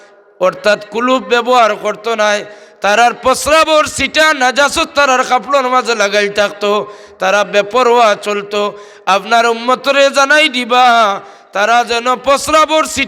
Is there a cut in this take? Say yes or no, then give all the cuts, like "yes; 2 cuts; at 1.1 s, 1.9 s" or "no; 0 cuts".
no; 0 cuts